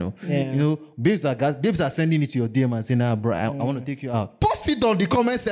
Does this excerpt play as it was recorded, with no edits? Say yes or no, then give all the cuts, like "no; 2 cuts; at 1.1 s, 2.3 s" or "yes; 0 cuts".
no; 1 cut; at 4.3 s